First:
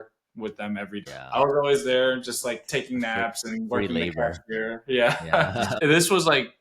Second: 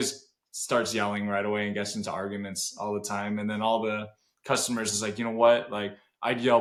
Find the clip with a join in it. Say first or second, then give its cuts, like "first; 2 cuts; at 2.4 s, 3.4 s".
first; 2 cuts; at 1.1 s, 5.7 s